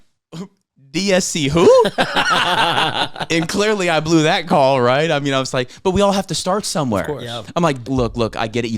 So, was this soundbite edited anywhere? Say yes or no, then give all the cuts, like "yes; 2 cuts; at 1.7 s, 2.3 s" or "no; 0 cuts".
yes; 1 cut; at 7.8 s